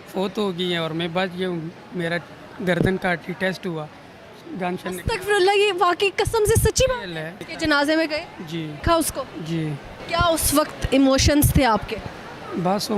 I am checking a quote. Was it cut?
yes; 3 cuts; at 7.5 s, 8.8 s, 10.0 s

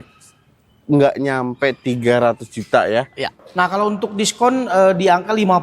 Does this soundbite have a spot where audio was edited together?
yes; 1 cut; at 3.3 s

